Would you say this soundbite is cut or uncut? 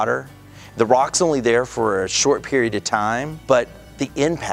cut